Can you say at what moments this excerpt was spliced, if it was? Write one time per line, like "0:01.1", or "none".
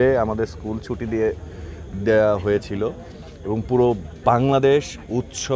none

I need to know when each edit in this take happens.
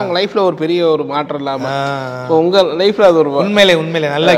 none

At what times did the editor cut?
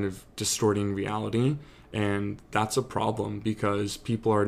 none

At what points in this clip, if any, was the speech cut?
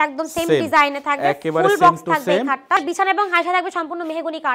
0:02.8

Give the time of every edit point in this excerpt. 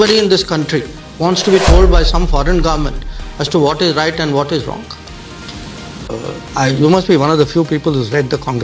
0:06.1

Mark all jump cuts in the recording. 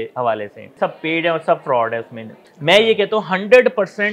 0:00.7
0:02.4

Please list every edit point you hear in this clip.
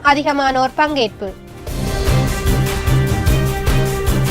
0:01.7

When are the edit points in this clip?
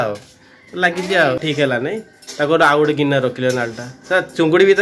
0:01.4

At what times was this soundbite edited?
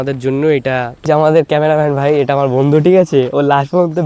0:01.0

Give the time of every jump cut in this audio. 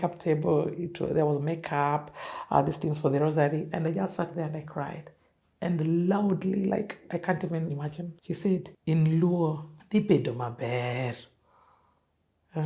none

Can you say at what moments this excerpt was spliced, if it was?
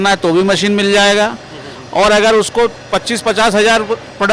none

